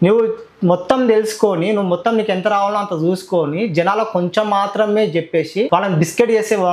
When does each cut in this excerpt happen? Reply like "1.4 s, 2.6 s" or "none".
5.7 s